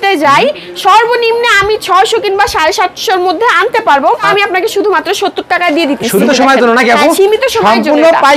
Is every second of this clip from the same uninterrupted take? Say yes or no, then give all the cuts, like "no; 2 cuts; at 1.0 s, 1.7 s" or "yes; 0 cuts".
no; 2 cuts; at 4.3 s, 6.2 s